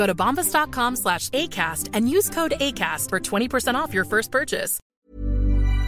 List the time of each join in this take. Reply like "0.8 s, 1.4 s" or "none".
4.8 s